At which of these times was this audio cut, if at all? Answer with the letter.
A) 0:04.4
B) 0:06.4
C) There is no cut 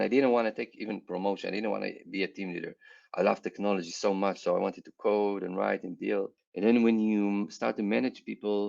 B